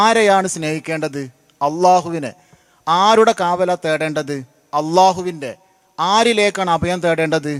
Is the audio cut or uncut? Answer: uncut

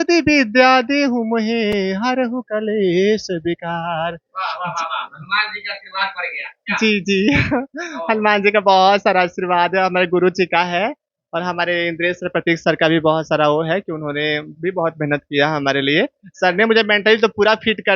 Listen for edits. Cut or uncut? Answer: uncut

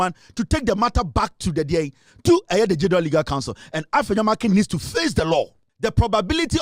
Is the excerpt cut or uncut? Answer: cut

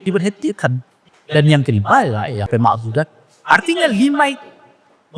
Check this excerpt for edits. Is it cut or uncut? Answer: cut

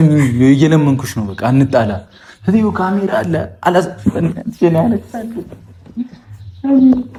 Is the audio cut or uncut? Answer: uncut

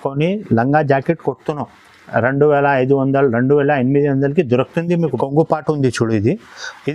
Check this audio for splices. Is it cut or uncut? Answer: cut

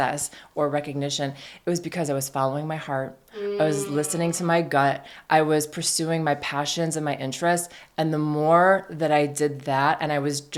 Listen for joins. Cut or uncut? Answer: uncut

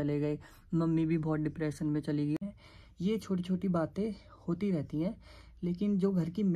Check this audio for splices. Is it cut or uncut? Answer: cut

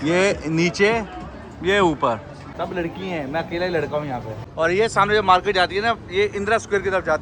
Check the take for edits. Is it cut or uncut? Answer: cut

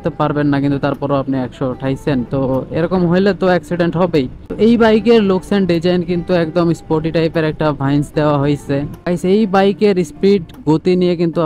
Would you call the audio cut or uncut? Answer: cut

